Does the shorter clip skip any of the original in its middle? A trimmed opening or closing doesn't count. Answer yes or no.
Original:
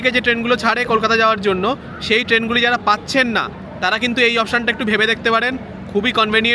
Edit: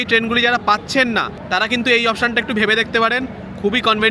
yes